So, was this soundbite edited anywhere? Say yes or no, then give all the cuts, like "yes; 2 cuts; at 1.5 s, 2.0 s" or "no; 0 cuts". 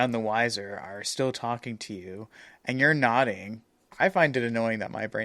yes; 1 cut; at 3.8 s